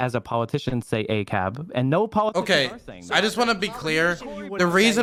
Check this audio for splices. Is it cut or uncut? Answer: uncut